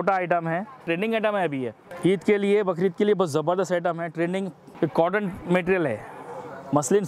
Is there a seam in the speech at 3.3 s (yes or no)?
no